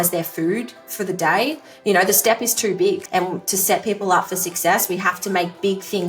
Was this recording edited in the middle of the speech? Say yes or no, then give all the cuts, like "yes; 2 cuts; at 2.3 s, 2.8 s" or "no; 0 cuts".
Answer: yes; 2 cuts; at 1.7 s, 3.0 s